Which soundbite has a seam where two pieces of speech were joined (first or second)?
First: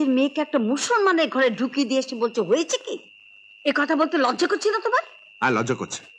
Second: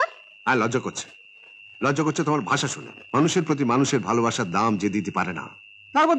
second